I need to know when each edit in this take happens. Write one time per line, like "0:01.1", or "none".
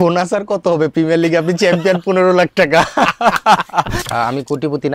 0:04.0